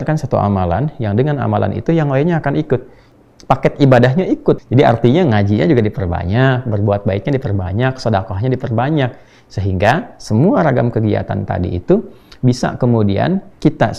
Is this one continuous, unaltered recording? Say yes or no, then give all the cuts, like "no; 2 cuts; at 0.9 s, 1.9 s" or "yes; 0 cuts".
no; 2 cuts; at 3.1 s, 4.6 s